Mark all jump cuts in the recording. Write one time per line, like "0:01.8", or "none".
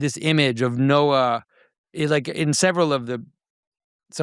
none